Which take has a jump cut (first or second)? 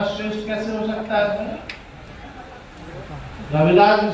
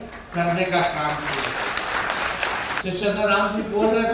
second